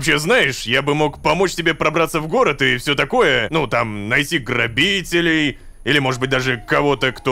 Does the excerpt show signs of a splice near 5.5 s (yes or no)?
no